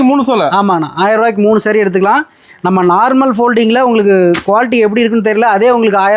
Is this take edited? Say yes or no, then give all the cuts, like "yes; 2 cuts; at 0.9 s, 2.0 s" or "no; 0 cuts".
no; 0 cuts